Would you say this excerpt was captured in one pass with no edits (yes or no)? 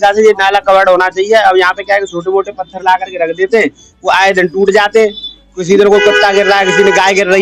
yes